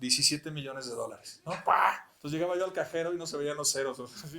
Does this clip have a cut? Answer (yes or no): yes